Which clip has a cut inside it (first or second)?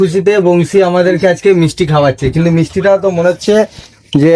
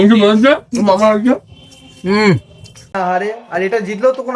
second